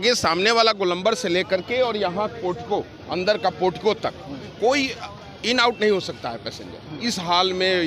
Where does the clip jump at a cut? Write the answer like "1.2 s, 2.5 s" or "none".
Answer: none